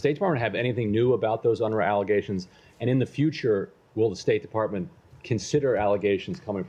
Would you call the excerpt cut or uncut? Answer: uncut